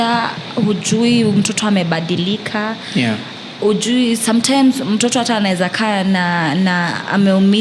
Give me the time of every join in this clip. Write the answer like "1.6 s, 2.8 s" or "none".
none